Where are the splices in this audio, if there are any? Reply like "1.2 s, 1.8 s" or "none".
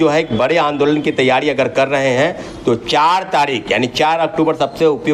none